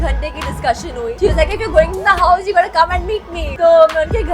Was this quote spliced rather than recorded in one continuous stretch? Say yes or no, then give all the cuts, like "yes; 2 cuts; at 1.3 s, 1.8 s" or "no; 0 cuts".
yes; 2 cuts; at 1.1 s, 3.4 s